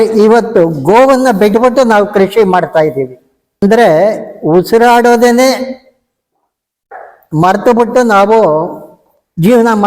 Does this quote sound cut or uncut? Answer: cut